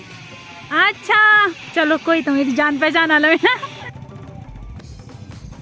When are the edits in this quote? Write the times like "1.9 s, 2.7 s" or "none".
none